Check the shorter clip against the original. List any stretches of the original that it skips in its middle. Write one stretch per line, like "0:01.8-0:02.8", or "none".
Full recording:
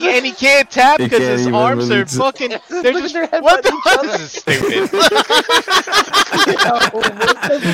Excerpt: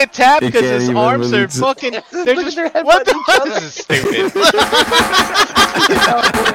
none